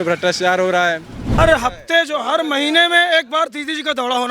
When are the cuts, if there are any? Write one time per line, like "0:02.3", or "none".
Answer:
0:01.4